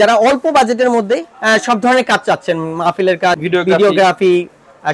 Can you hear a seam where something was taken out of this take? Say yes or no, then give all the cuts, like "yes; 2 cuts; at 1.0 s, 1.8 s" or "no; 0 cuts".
no; 0 cuts